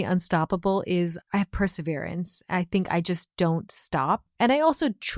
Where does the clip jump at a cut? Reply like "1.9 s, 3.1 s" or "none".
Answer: 1.2 s